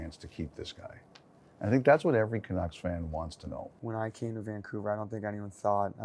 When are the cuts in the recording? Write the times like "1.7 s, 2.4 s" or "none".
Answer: 3.7 s